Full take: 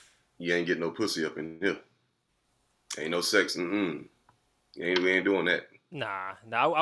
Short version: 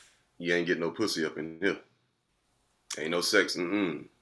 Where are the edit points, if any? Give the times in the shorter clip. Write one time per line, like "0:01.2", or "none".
none